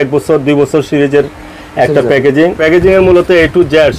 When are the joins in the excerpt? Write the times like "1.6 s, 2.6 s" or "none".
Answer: 2.6 s

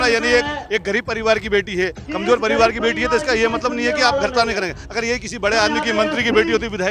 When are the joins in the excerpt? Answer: none

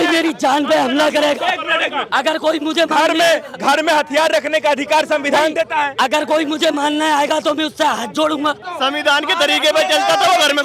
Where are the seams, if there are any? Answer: 8.7 s

